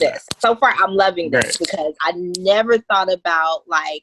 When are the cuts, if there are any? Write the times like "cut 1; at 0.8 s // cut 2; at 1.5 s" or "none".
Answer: cut 1; at 2.0 s